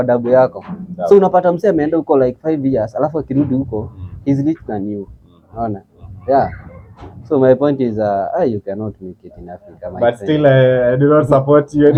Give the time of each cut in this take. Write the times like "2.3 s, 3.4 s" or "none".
none